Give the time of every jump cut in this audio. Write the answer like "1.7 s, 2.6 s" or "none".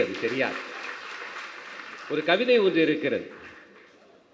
none